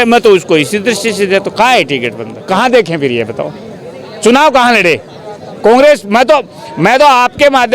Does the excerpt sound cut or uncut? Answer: cut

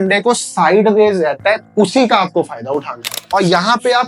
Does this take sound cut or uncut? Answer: cut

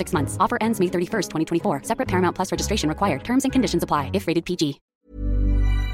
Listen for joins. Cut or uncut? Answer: cut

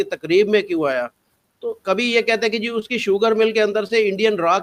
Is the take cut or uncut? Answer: uncut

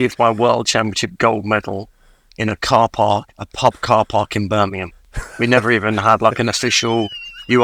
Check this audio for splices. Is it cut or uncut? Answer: uncut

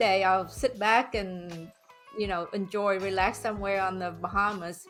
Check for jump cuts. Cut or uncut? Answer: uncut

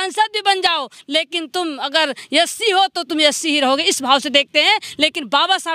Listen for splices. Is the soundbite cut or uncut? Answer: uncut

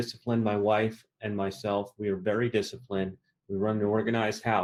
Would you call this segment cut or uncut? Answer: uncut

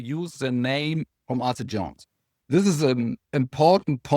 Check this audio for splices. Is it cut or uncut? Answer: cut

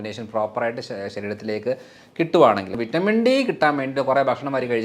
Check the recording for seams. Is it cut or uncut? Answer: cut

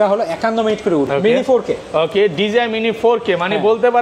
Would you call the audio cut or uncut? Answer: cut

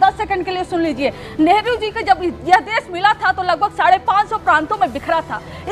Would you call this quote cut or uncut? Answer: uncut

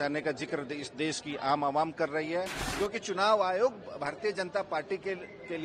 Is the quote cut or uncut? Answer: cut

